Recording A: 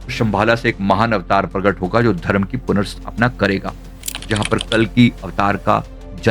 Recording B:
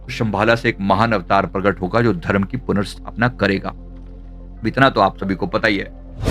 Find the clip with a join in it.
A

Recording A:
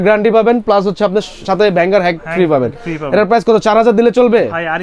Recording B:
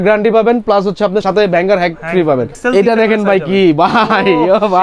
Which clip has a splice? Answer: B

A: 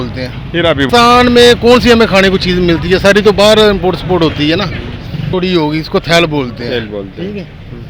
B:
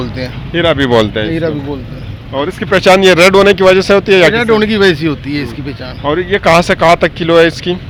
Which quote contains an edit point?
A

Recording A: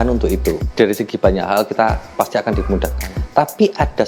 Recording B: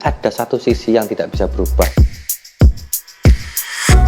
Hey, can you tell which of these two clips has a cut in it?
B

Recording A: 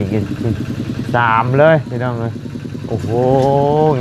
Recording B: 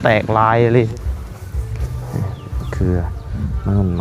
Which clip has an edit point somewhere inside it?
B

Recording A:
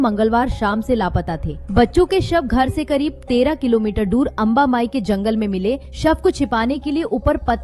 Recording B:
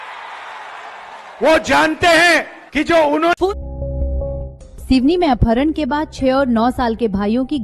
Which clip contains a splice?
B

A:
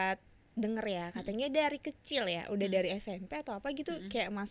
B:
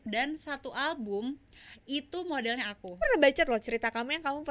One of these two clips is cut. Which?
B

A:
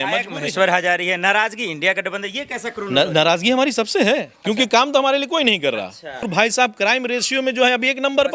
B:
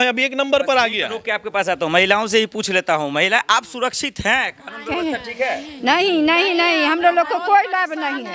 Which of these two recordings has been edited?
A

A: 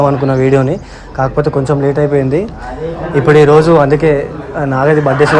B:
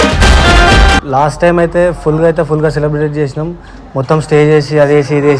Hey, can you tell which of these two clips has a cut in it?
B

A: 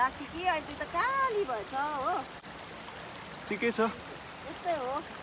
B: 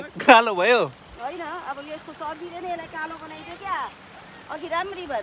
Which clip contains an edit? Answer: A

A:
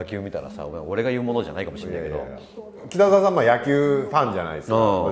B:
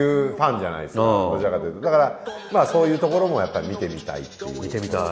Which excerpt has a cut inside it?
A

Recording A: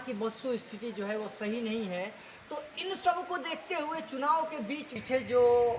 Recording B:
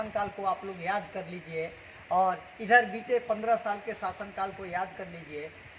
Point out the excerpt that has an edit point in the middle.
A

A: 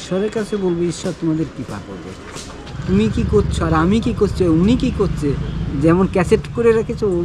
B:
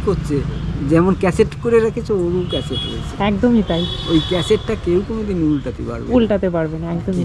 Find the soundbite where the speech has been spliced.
A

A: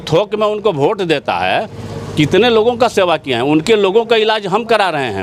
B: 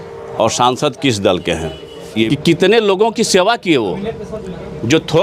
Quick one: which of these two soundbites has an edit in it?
B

